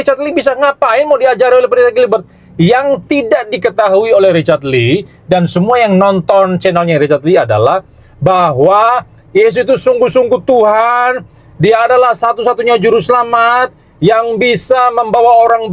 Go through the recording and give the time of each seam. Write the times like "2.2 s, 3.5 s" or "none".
none

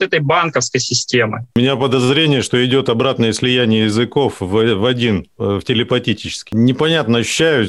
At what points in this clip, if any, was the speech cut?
1.6 s, 6.5 s

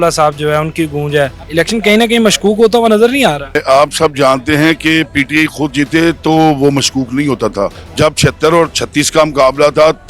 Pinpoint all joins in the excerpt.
1.4 s, 3.6 s, 7.8 s

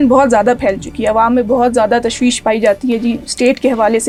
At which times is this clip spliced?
none

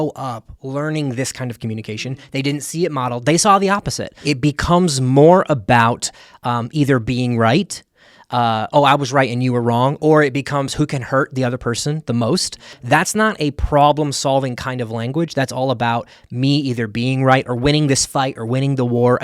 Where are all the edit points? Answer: 4.1 s, 12.8 s

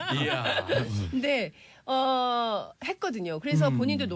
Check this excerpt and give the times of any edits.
1.5 s

